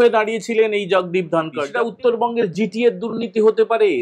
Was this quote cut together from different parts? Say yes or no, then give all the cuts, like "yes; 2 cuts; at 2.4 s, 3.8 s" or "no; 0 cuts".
yes; 1 cut; at 1.6 s